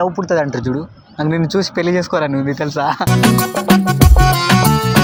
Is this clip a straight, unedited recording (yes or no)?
yes